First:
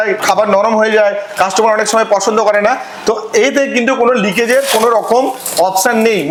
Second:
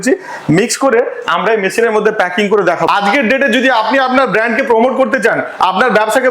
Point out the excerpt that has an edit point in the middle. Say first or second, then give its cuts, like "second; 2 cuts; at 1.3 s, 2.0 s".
second; 1 cut; at 2.9 s